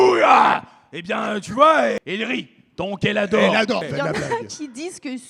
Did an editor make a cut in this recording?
yes; 2 cuts; at 2.0 s, 3.9 s

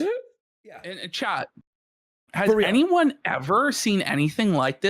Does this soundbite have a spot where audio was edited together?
yes; 1 cut; at 0.9 s

